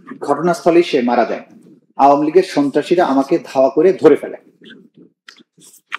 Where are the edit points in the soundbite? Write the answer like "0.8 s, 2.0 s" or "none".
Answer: none